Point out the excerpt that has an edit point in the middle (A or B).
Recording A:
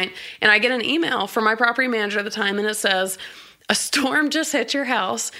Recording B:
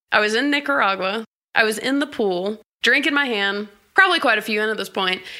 B